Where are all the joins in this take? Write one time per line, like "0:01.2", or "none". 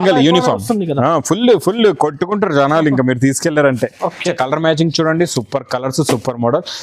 0:04.3